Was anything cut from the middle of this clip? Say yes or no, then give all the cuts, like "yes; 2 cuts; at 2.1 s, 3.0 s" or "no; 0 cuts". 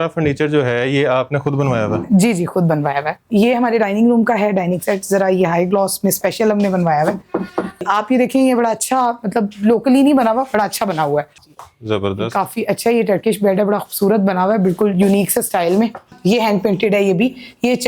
yes; 4 cuts; at 3.3 s, 7.8 s, 11.3 s, 16.1 s